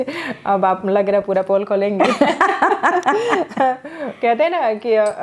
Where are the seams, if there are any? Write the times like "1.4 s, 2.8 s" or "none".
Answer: none